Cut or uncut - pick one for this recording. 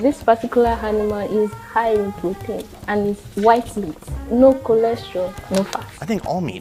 uncut